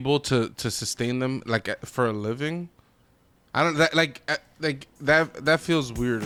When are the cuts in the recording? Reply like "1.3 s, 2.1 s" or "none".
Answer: none